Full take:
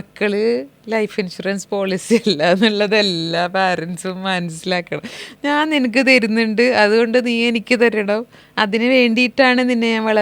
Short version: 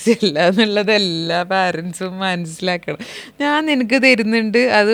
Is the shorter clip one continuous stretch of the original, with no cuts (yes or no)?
yes